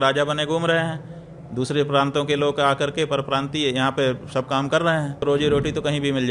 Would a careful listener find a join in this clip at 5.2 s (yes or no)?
yes